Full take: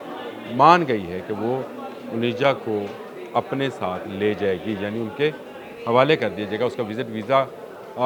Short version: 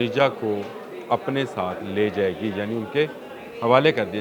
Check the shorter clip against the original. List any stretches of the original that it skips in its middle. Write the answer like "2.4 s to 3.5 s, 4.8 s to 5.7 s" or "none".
none